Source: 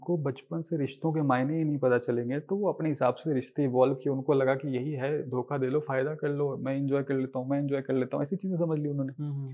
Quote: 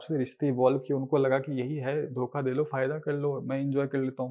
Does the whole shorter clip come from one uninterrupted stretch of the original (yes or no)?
yes